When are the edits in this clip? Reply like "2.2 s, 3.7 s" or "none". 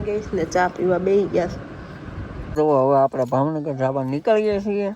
2.5 s